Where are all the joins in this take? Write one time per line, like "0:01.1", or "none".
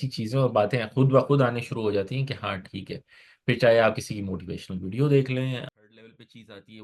0:05.7